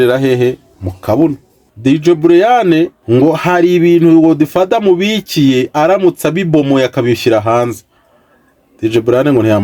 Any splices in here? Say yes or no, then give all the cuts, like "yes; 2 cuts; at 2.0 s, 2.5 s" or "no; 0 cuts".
yes; 2 cuts; at 1.8 s, 3.0 s